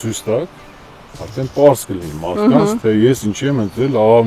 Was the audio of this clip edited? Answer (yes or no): no